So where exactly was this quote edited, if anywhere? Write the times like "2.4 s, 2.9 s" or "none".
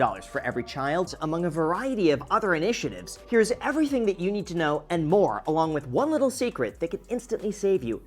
1.1 s